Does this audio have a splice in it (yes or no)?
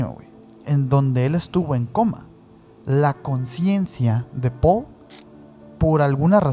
no